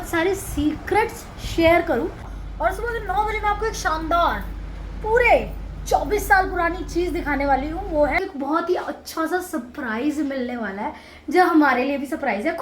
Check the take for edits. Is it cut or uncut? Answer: cut